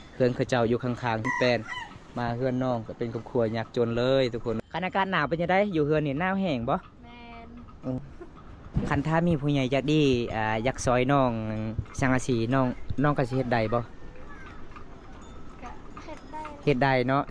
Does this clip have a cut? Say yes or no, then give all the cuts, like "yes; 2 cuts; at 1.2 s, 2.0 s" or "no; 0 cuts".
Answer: yes; 3 cuts; at 1.3 s, 4.6 s, 8.0 s